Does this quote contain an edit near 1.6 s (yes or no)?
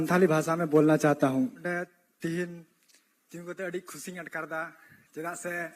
yes